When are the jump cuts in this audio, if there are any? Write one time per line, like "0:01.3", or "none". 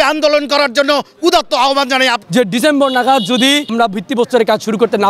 0:02.2
0:03.7

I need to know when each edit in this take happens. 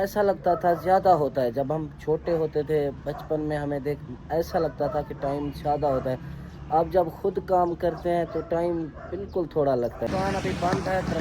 0:10.1

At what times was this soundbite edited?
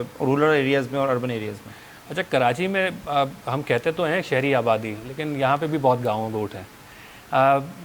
none

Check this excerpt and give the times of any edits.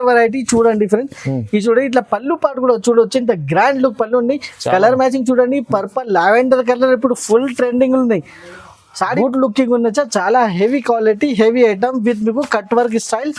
0:09.1

